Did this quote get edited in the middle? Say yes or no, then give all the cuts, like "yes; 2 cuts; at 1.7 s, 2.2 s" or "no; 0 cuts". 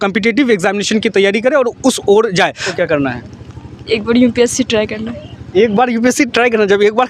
yes; 1 cut; at 2.8 s